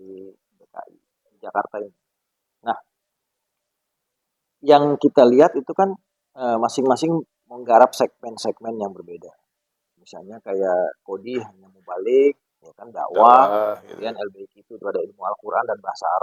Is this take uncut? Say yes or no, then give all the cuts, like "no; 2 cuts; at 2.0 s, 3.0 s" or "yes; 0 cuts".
yes; 0 cuts